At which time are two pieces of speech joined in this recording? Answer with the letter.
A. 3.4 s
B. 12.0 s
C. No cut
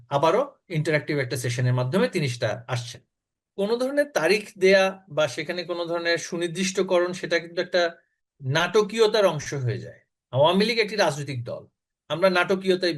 A